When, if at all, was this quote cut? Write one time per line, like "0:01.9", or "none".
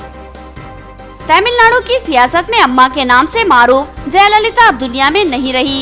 0:01.2